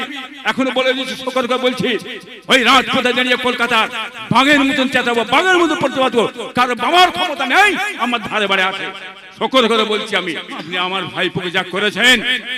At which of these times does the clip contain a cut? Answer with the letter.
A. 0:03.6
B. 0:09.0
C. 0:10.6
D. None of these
C